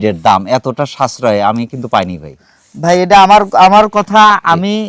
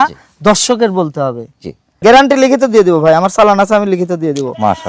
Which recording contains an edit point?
second; 1 cut; at 1.8 s

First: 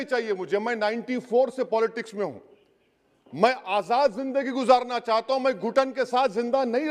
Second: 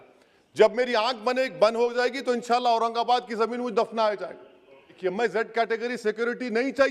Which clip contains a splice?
second; 1 cut; at 4.9 s

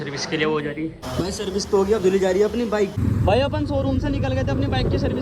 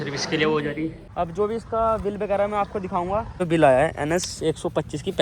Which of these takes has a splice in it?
second; 2 cuts; at 1.0 s, 3.4 s

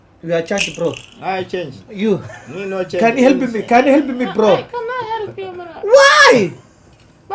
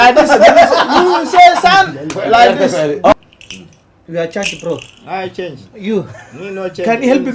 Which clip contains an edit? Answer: second; 1 cut; at 2.9 s

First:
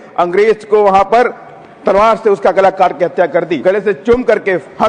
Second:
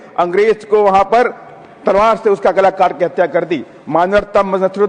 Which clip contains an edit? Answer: first; 1 cut; at 3.6 s

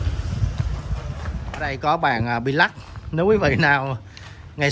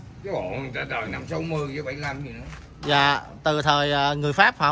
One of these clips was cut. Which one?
first; 1 cut; at 1.7 s

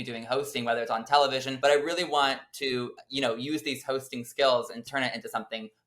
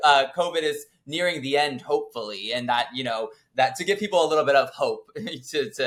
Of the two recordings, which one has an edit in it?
first; 2 cuts; at 1.5 s, 4.9 s

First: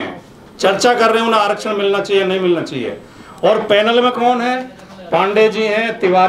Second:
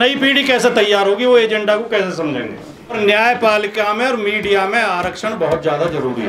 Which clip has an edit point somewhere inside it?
second; 1 cut; at 3.0 s

